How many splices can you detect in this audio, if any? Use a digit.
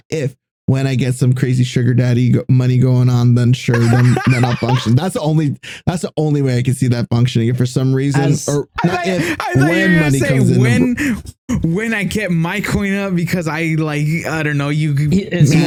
0